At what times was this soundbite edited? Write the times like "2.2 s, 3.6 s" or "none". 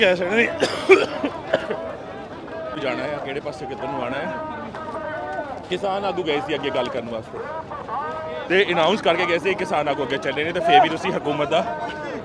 none